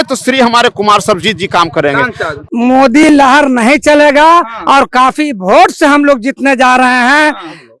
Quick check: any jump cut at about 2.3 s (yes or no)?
yes